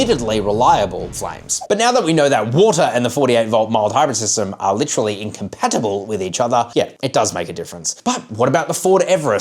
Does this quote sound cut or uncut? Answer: cut